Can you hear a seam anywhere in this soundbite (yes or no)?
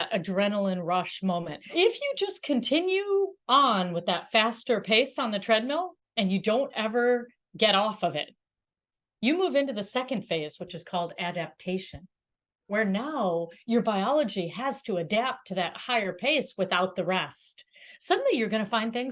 yes